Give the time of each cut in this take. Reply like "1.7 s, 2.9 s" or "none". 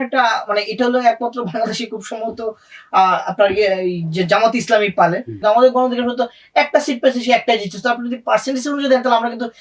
5.3 s